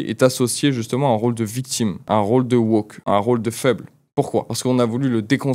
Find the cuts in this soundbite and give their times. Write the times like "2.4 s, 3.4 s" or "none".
2.0 s, 2.9 s, 4.5 s

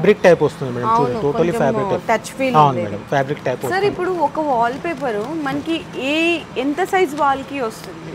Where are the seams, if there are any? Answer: none

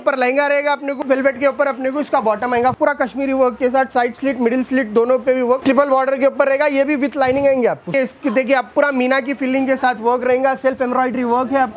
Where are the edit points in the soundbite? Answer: 0.9 s, 2.8 s, 5.6 s, 7.9 s

